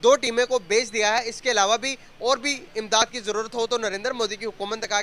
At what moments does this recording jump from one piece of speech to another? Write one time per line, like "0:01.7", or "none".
none

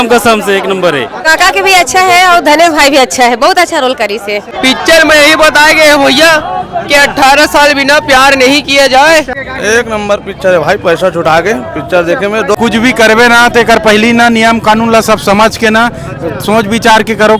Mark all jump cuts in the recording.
0:01.3
0:04.5
0:09.4
0:12.6

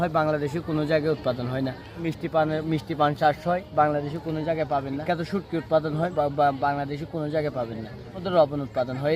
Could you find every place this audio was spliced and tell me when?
0:02.0
0:05.0
0:06.1
0:08.2

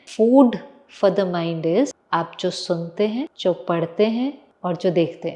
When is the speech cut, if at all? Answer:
0:02.0
0:03.3
0:04.5

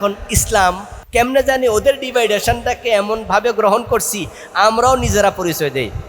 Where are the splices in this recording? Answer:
0:00.9

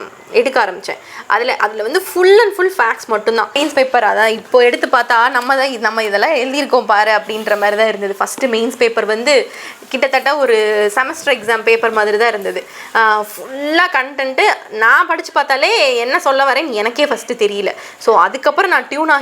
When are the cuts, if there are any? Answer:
0:03.5

